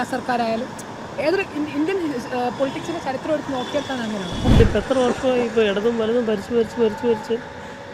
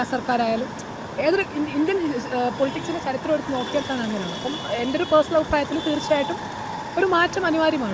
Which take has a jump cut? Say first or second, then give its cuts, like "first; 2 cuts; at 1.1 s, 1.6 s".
first; 1 cut; at 4.6 s